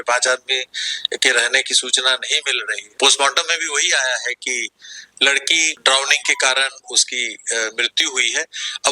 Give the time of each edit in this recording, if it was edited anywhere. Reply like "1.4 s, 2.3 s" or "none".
2.9 s, 5.7 s